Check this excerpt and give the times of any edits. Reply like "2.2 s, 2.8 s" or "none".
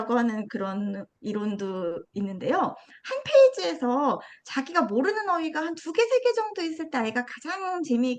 none